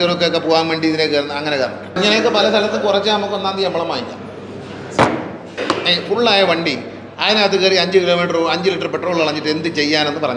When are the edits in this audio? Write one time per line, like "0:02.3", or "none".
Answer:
0:01.9
0:05.5